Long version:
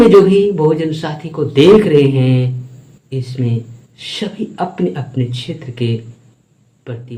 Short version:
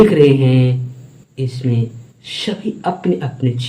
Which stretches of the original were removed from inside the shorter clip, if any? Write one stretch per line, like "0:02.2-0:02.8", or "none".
none